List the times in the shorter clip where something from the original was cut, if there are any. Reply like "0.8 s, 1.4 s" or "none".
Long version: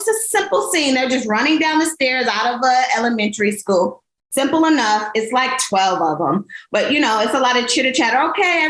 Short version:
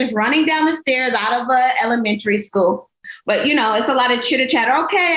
3.1 s